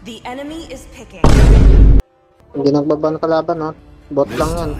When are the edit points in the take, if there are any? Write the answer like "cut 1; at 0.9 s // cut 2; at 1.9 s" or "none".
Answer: cut 1; at 1.1 s // cut 2; at 2.0 s // cut 3; at 3.8 s